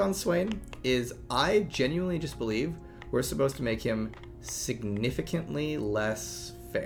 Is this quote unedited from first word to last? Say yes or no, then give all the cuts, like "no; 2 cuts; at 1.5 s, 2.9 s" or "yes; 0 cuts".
yes; 0 cuts